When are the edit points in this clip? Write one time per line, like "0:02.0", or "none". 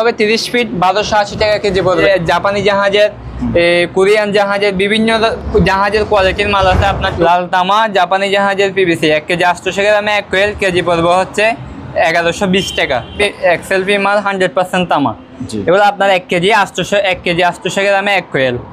0:02.0
0:07.1
0:13.2